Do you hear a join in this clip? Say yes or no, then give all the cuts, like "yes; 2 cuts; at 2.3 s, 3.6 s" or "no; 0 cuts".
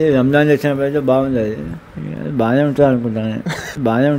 no; 0 cuts